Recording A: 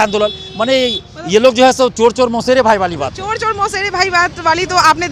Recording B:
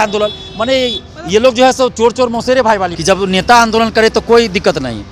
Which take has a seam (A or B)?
B